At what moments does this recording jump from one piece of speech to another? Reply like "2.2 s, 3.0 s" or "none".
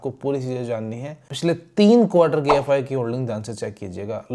1.2 s